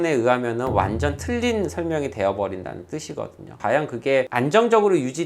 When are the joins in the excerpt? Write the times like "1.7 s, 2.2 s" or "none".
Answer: 3.5 s